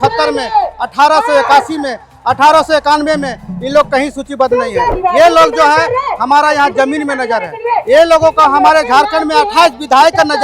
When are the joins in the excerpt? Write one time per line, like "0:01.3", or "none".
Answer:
0:04.9